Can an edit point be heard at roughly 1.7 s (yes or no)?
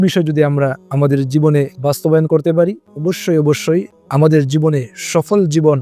no